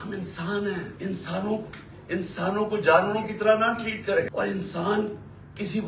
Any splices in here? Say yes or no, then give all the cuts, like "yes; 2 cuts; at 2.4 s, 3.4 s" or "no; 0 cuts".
yes; 2 cuts; at 0.9 s, 4.3 s